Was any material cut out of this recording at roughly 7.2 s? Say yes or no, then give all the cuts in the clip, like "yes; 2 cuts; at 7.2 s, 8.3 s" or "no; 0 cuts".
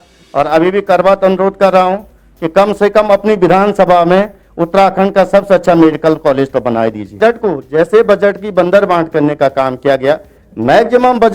yes; 1 cut; at 7.2 s